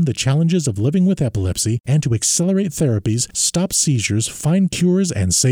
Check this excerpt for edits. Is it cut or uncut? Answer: uncut